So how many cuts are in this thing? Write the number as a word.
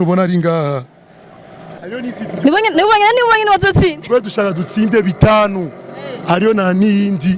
one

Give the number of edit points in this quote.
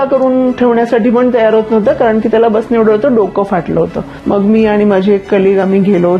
one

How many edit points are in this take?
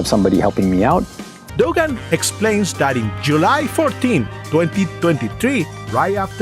one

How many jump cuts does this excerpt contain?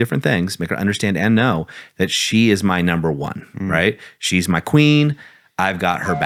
zero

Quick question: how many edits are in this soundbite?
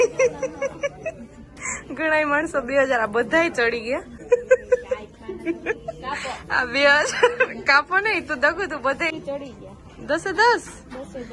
two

